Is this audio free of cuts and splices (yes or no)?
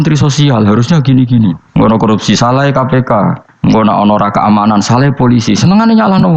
no